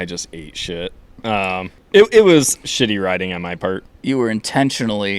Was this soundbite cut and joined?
yes; 2 cuts; at 1.8 s, 3.9 s

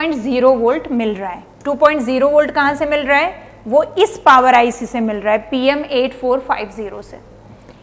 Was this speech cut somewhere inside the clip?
no; 0 cuts

